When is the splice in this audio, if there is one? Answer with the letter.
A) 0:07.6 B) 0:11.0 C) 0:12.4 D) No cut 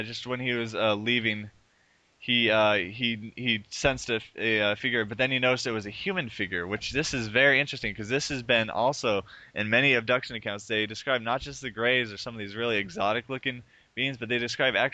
B